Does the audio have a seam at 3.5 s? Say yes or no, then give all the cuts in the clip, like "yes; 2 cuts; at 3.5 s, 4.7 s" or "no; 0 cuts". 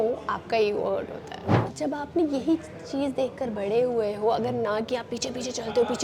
no; 1 cut; at 1.6 s